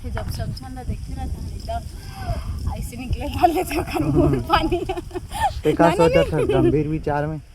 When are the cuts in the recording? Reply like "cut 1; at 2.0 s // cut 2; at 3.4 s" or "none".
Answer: none

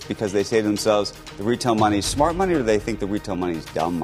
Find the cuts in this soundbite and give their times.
none

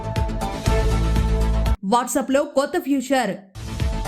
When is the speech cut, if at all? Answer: none

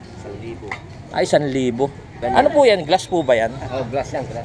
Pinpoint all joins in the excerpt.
cut 1; at 2.2 s

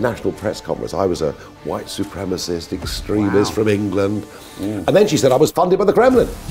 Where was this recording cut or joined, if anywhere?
cut 1; at 5.5 s

